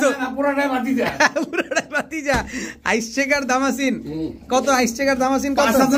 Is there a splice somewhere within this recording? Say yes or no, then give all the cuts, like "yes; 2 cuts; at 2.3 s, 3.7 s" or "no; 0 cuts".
no; 0 cuts